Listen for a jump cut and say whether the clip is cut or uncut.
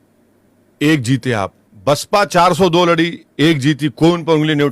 cut